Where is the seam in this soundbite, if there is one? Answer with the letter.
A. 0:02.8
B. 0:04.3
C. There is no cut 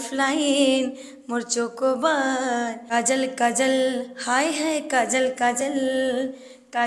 A